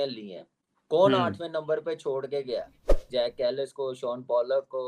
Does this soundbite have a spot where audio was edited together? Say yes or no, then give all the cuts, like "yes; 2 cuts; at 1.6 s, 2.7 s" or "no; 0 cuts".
yes; 1 cut; at 3.0 s